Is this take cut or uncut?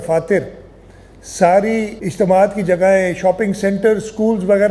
cut